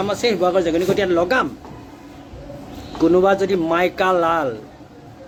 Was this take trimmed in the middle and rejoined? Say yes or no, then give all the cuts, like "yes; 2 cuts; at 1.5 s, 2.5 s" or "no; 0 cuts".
no; 0 cuts